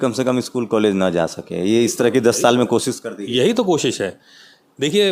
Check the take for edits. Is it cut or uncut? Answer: uncut